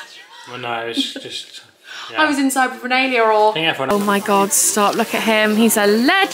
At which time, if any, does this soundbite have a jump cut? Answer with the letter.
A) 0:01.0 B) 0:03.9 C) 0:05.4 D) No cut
B